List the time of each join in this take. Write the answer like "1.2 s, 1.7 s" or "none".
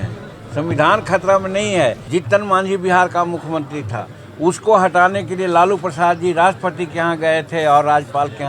2.0 s